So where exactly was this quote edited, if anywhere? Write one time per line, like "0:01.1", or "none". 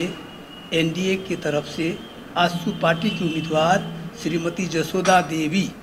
none